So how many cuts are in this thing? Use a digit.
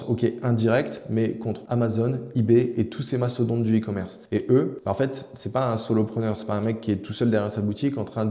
0